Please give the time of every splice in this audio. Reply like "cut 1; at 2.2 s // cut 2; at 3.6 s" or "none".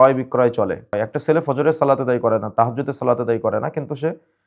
cut 1; at 0.9 s